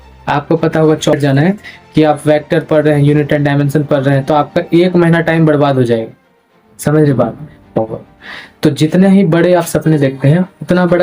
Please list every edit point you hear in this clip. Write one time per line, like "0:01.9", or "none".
0:01.1
0:07.8